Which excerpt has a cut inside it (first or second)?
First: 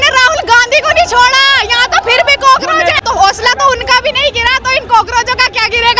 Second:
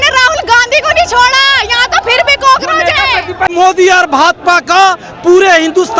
second